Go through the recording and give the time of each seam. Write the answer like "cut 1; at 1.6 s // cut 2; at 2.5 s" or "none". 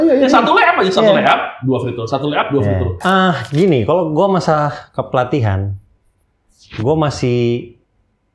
cut 1; at 3.0 s